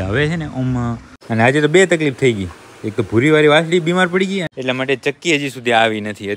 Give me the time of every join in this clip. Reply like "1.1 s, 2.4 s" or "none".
1.1 s, 4.5 s

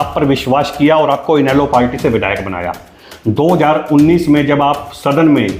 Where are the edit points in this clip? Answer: none

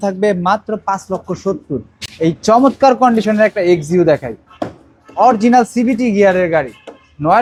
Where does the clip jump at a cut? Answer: none

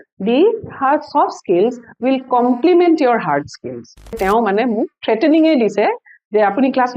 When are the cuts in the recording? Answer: 4.2 s

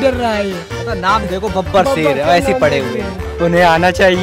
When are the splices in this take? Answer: 3.2 s

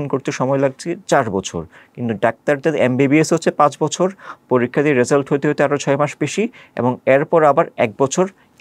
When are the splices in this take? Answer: none

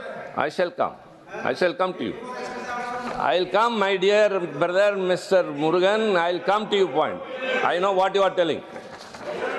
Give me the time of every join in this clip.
none

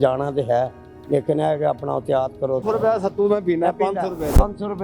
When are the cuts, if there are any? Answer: 2.6 s

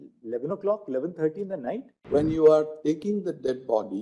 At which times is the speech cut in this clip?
1.9 s

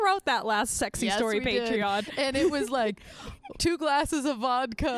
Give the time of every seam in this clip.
none

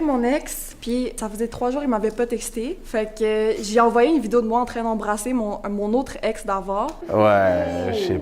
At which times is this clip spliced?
1.0 s, 2.8 s, 7.0 s

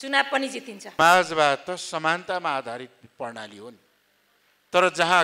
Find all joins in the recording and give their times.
1.0 s

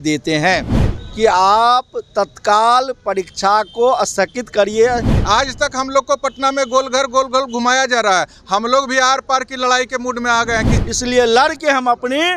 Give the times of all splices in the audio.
5.1 s, 10.8 s

